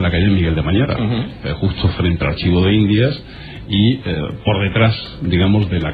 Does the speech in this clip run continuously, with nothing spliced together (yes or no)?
yes